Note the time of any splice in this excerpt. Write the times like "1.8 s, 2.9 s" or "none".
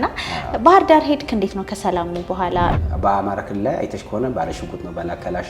2.7 s